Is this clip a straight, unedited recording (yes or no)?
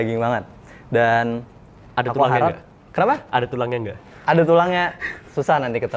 yes